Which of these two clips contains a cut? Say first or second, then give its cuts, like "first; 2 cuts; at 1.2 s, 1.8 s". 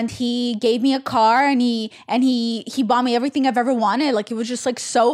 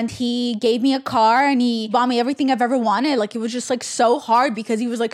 second; 1 cut; at 1.9 s